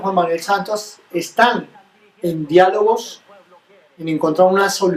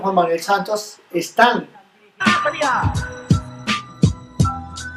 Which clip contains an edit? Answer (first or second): first